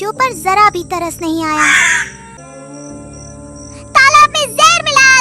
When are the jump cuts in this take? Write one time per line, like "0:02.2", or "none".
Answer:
0:02.4